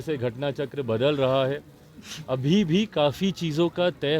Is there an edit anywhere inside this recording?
no; 0 cuts

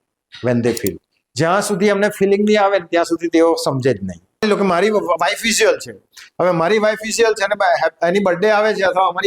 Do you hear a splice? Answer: yes; 1 cut; at 4.4 s

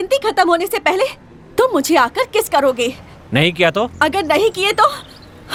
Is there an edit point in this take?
no; 0 cuts

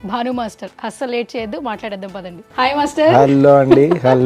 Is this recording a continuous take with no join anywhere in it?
yes; 0 cuts

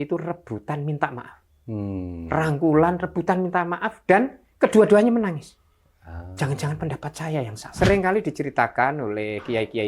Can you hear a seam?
yes; 1 cut; at 7.6 s

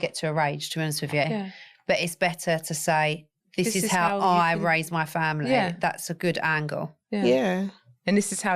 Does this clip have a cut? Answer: no; 0 cuts

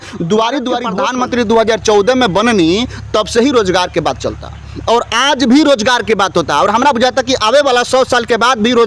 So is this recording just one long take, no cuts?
no; 1 cut; at 1.0 s

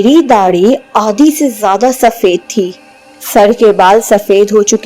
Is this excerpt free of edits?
no; 1 cut; at 3.1 s

